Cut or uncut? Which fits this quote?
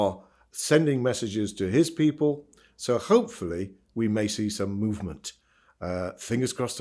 uncut